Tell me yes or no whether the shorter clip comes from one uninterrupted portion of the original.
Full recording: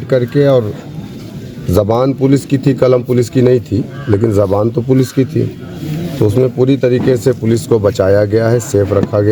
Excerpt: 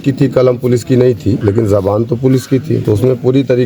no